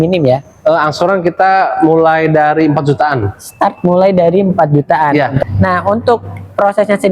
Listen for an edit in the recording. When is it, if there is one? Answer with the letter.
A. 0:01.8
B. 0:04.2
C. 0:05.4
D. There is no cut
C